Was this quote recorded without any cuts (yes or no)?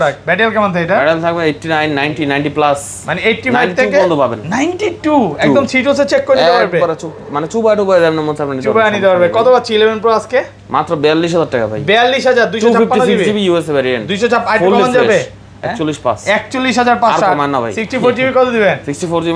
yes